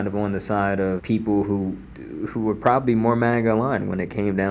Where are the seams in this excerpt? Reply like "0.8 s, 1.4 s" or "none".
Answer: 1.0 s